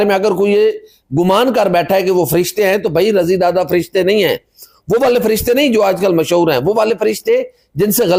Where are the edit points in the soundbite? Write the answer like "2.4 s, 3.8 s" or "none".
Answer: none